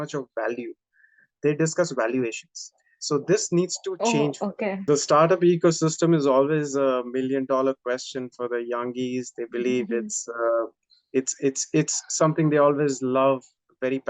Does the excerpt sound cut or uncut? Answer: cut